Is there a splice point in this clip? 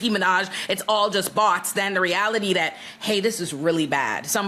no; 0 cuts

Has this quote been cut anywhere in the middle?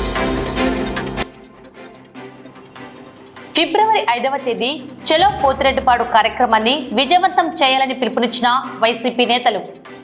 yes; 1 cut; at 0.9 s

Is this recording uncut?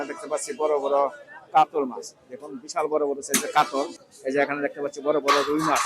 no; 1 cut; at 4.1 s

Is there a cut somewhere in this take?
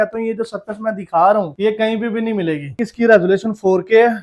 yes; 1 cut; at 2.8 s

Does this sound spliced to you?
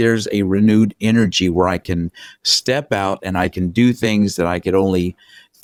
no; 0 cuts

